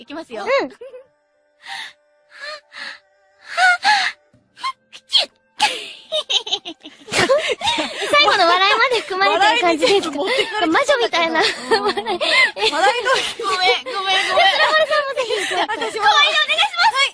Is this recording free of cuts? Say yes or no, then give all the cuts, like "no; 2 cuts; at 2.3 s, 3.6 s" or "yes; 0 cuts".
no; 1 cut; at 13.1 s